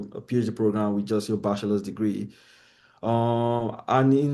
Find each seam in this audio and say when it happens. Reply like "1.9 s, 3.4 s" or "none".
none